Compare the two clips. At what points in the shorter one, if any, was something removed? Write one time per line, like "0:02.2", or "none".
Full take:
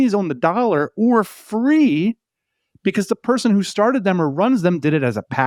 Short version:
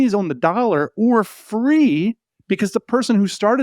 0:02.3

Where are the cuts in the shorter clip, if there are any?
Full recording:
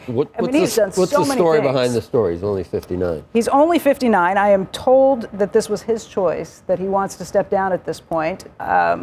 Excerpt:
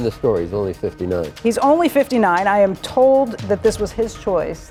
none

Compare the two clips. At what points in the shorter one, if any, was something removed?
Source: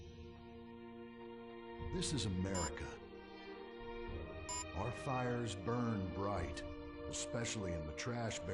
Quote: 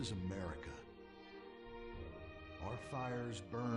none

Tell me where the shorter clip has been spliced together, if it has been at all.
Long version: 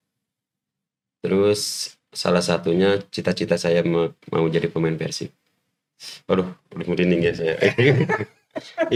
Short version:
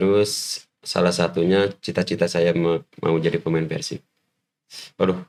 none

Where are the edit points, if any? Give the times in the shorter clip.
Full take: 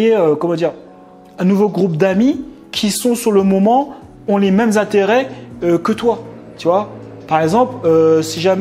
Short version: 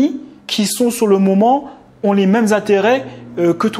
none

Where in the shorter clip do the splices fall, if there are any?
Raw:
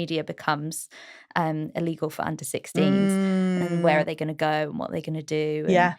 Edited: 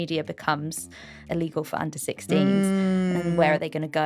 0:01.2

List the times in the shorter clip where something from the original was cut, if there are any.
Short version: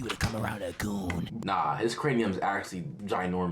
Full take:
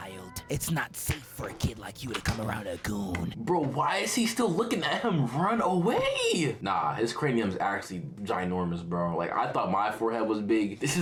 0:01.4

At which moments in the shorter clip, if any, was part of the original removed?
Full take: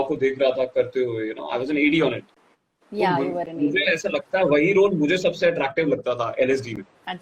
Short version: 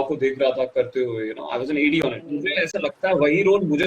0:02.3

